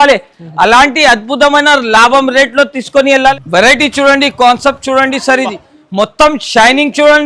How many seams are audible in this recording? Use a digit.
1